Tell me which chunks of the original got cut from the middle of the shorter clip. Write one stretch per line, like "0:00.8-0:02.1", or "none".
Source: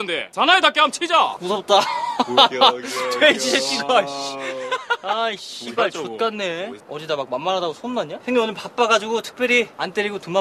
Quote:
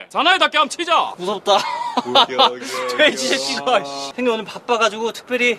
0:04.3-0:08.2